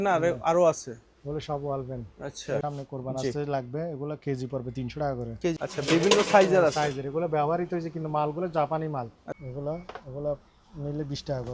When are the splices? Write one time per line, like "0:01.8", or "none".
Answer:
0:02.6
0:05.6
0:09.2